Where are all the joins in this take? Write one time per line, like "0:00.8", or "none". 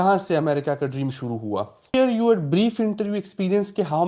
0:01.9